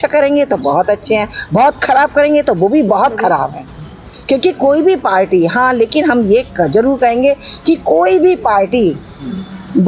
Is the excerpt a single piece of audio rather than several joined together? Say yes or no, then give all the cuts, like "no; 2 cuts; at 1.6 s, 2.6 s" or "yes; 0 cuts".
yes; 0 cuts